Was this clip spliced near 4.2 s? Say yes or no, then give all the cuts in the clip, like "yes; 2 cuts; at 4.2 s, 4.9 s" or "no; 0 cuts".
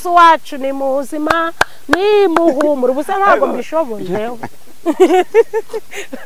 yes; 1 cut; at 4.2 s